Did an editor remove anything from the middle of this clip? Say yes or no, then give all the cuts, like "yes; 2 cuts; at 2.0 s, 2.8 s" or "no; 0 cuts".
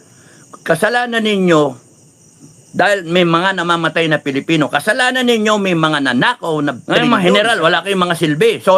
yes; 1 cut; at 6.9 s